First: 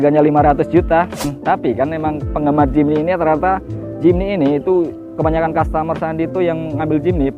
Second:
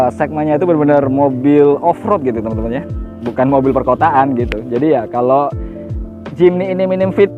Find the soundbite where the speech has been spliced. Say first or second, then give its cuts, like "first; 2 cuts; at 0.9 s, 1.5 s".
first; 1 cut; at 1.3 s